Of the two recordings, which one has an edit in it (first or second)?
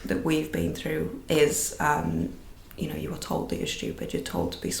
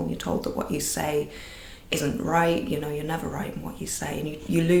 first